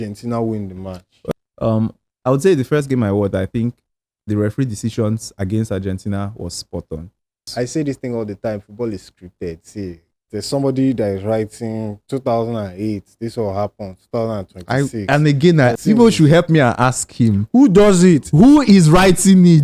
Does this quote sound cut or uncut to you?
cut